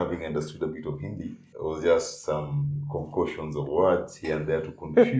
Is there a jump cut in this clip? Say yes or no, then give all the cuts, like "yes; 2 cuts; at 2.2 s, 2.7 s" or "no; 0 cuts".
yes; 1 cut; at 1.5 s